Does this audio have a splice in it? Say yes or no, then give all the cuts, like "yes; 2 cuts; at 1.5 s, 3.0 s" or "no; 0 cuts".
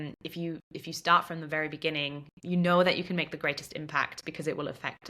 yes; 1 cut; at 2.3 s